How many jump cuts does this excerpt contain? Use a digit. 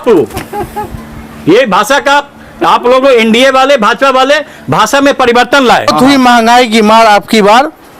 1